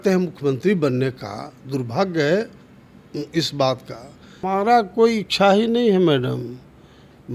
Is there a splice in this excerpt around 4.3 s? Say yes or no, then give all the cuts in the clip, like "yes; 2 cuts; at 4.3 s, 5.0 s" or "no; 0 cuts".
yes; 1 cut; at 4.3 s